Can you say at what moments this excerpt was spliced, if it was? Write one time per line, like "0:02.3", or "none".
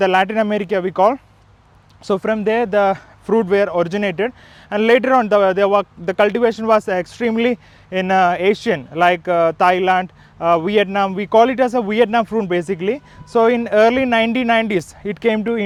none